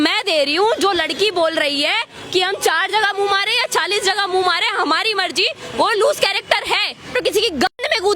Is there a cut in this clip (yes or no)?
yes